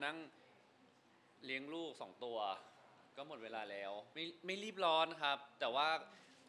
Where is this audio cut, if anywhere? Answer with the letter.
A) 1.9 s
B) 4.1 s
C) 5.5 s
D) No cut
B